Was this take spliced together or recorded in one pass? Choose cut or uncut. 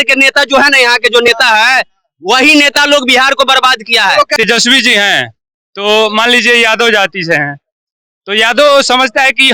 cut